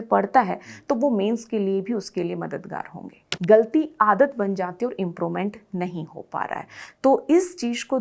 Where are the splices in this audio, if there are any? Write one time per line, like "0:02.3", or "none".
0:03.3